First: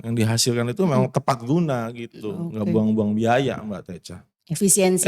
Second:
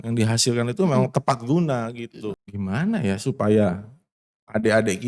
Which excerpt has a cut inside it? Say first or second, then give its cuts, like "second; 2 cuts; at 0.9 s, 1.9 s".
second; 1 cut; at 2.4 s